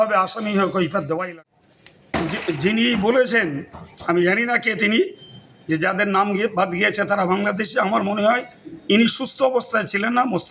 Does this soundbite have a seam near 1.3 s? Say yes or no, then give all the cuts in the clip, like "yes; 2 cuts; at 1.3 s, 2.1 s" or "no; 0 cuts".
yes; 1 cut; at 1.3 s